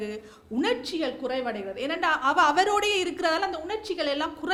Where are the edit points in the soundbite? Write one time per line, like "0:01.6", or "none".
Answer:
none